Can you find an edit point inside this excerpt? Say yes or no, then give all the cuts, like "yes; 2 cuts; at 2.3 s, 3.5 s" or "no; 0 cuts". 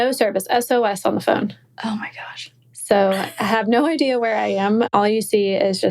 yes; 1 cut; at 4.9 s